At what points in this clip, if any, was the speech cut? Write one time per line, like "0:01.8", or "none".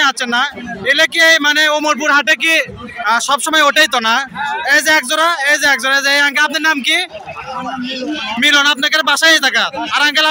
none